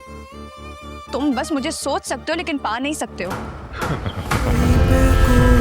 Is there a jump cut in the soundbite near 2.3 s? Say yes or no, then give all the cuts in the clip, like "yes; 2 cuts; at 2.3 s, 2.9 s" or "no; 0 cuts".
no; 1 cut; at 4.5 s